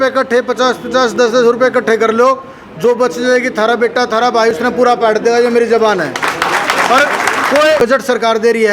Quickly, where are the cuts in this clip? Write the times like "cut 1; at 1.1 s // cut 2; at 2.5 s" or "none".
cut 1; at 7.8 s

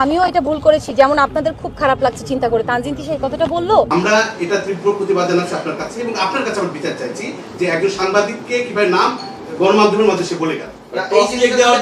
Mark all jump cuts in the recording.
cut 1; at 3.9 s

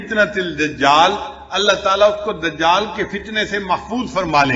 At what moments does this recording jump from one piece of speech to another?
none

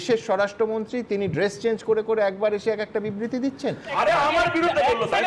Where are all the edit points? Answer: cut 1; at 3.9 s

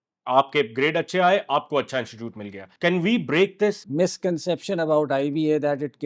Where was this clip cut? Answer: cut 1; at 2.6 s // cut 2; at 3.8 s

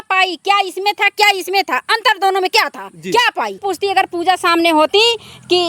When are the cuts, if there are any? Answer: cut 1; at 3.7 s

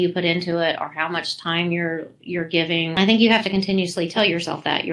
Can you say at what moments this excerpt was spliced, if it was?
cut 1; at 3.0 s // cut 2; at 4.1 s

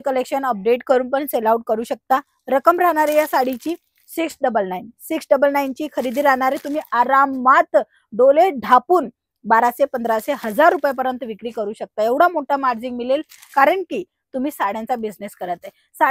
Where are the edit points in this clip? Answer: none

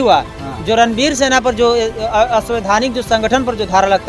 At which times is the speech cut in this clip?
none

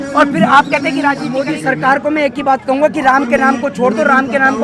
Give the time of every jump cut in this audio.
cut 1; at 1.3 s

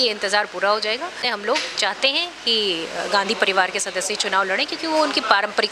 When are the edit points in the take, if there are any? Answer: cut 1; at 1.2 s

